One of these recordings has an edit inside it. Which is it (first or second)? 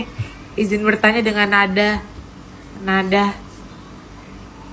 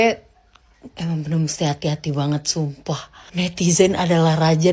second